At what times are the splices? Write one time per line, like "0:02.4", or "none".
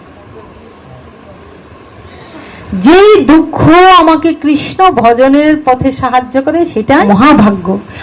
0:07.1